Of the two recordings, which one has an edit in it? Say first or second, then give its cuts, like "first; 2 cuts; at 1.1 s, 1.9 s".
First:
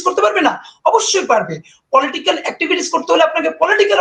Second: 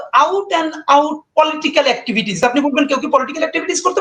second; 1 cut; at 2.4 s